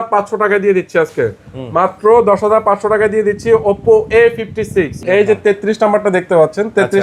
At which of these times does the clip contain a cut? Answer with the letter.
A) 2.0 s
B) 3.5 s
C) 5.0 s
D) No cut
C